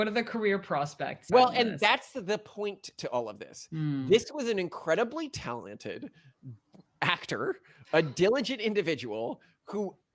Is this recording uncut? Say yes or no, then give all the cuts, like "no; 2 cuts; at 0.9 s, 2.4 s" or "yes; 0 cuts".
no; 1 cut; at 1.2 s